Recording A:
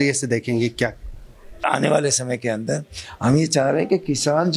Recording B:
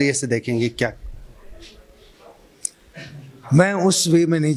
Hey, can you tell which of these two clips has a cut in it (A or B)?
A